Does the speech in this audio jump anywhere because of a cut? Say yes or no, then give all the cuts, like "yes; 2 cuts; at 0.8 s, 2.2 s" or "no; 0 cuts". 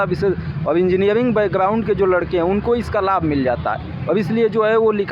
no; 0 cuts